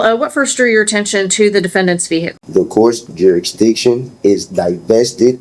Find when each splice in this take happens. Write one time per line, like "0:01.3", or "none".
0:02.4